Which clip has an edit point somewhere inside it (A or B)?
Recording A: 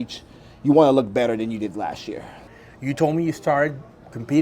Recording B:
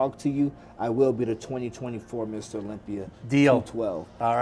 A